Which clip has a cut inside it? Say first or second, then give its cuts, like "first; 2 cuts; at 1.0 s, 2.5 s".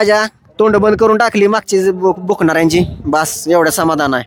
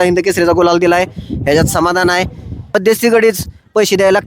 second; 1 cut; at 2.6 s